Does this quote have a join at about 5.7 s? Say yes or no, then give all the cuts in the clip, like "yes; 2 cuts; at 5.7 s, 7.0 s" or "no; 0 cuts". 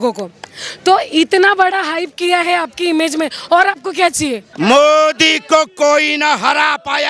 no; 1 cut; at 4.5 s